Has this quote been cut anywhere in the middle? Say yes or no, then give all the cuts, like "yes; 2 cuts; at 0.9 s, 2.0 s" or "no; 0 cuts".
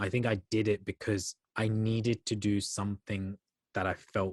yes; 1 cut; at 1.4 s